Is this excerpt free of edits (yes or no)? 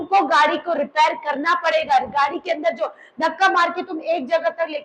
yes